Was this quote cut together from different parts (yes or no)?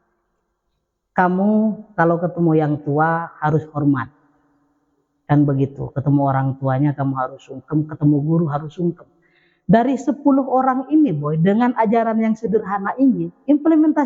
no